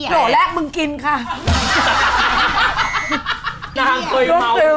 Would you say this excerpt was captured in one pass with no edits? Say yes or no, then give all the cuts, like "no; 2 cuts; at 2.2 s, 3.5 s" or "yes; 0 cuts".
no; 1 cut; at 3.7 s